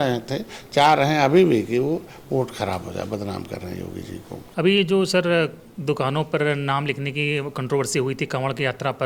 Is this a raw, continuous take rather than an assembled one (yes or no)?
no